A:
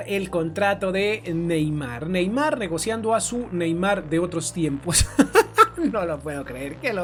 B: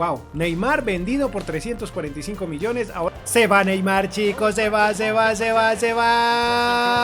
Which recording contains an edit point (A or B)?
B